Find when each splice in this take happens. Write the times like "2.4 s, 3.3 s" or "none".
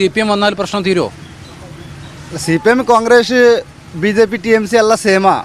none